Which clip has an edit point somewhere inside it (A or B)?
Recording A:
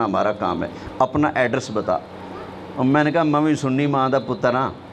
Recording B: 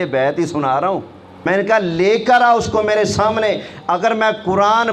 B